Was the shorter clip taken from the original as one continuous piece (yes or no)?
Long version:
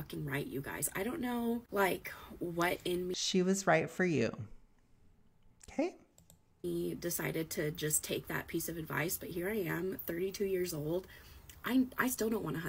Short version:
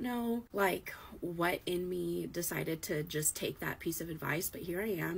no